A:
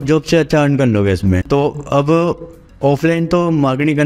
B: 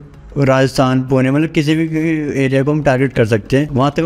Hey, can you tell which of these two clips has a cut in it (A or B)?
A